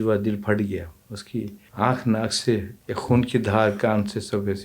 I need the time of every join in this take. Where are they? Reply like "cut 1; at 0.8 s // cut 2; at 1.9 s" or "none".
cut 1; at 1.6 s // cut 2; at 2.8 s

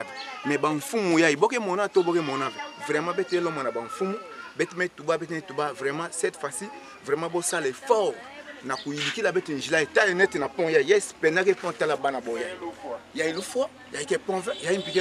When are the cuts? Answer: none

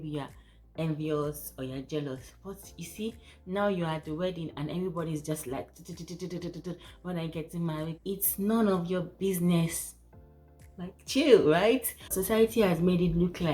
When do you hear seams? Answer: cut 1; at 12.1 s

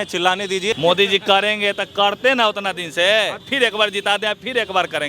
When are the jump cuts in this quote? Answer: cut 1; at 0.8 s // cut 2; at 3.4 s

